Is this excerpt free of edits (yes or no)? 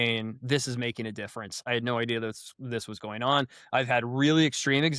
no